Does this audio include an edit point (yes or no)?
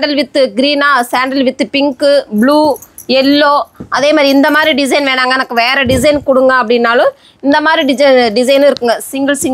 no